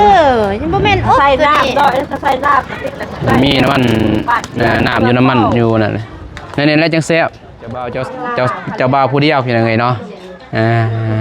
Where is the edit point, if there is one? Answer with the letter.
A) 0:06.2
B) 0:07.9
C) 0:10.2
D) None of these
B